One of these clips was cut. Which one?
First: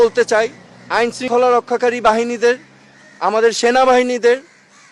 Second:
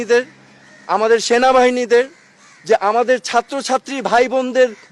first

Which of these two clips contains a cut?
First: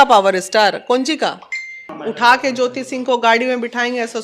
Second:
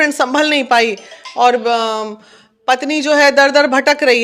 first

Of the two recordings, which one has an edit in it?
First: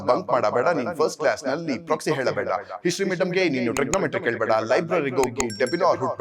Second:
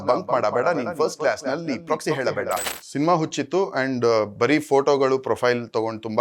second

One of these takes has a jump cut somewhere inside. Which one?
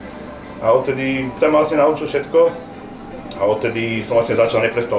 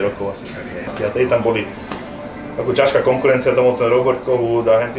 second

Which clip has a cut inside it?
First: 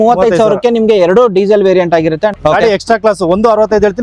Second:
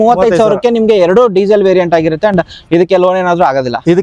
first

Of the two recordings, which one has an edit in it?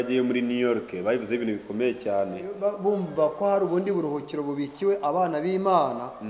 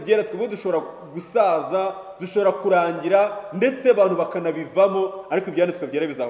first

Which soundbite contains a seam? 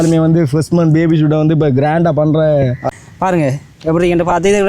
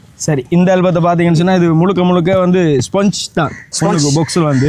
first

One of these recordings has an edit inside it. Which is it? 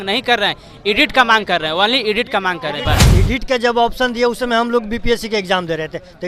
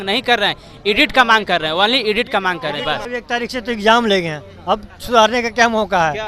first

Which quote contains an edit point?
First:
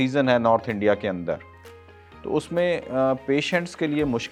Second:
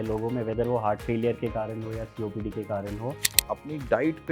second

